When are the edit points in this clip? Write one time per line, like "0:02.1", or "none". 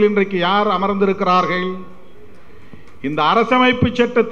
none

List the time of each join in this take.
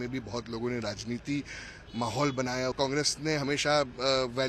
0:02.7

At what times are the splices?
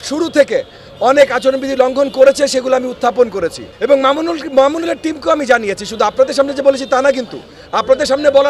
0:03.6

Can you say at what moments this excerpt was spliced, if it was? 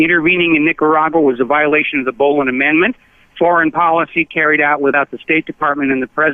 none

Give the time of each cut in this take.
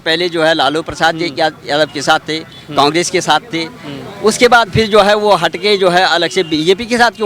none

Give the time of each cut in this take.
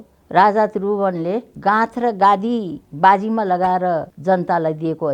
0:01.5
0:02.8
0:04.1

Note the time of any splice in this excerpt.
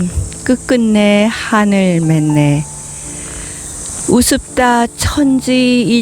none

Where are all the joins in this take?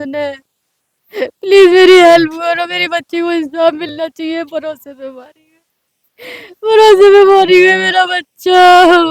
none

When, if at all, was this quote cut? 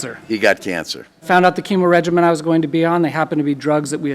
0:01.2

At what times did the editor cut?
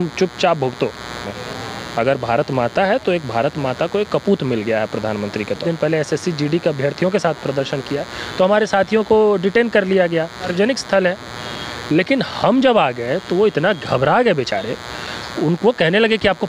0:01.2
0:05.6
0:10.5

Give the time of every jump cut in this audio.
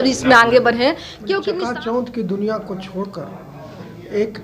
0:01.5

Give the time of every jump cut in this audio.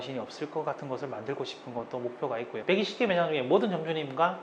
0:02.6

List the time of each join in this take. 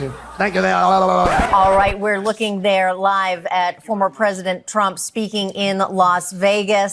0:01.4

